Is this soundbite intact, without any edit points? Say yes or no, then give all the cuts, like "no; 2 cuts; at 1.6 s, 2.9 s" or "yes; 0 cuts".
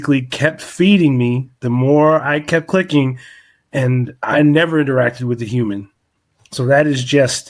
yes; 0 cuts